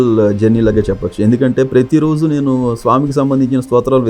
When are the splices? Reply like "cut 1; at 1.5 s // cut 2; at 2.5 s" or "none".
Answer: none